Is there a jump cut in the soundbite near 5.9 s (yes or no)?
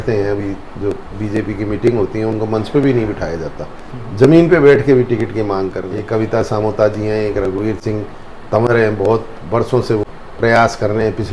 yes